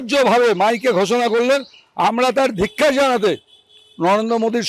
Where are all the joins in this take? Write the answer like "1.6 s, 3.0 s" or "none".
none